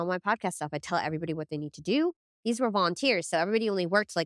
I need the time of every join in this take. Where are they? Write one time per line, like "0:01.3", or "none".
none

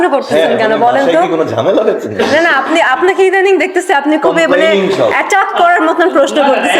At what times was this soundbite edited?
none

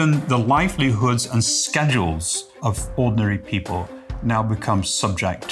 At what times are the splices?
none

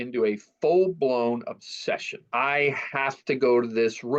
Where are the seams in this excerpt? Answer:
0:02.3

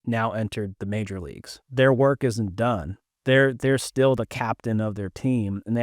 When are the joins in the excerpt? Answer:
0:01.6

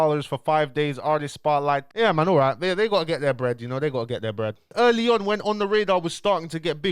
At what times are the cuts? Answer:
0:01.9
0:04.7

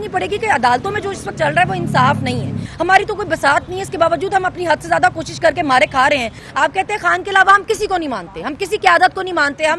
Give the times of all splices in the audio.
0:02.6
0:06.4

